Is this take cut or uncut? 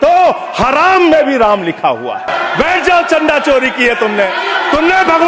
cut